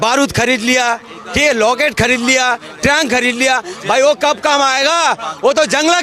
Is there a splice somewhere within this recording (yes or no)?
no